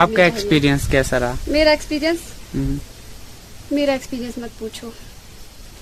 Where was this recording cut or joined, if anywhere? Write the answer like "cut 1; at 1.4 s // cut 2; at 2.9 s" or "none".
none